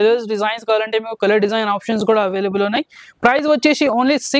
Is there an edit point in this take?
no; 0 cuts

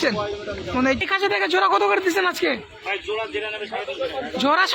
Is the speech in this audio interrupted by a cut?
yes; 1 cut; at 1.0 s

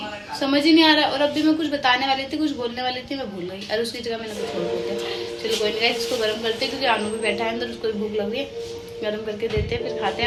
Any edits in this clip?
no; 0 cuts

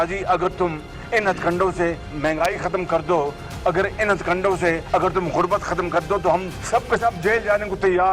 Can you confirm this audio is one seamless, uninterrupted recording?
yes; 0 cuts

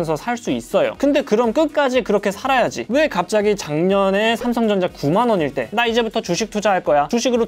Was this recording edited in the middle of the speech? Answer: no; 0 cuts

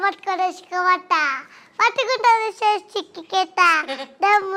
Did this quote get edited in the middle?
no; 0 cuts

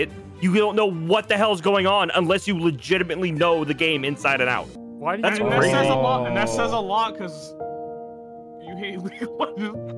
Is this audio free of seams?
no; 1 cut; at 4.8 s

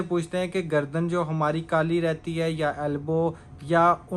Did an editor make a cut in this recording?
no; 0 cuts

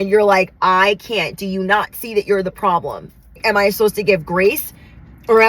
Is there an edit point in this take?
yes; 1 cut; at 3.4 s

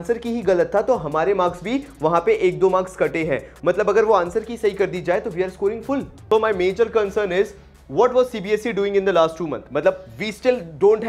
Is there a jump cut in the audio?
yes; 1 cut; at 6.1 s

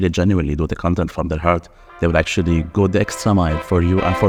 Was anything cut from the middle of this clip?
no; 0 cuts

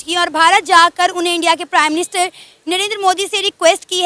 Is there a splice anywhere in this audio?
no; 0 cuts

